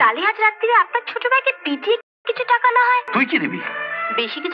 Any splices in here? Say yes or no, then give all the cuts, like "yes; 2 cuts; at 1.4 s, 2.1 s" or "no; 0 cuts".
yes; 1 cut; at 3.1 s